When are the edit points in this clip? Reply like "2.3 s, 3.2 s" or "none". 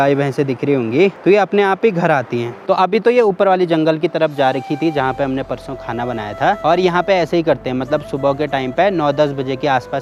none